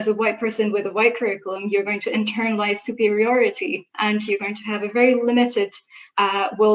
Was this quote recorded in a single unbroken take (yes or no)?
yes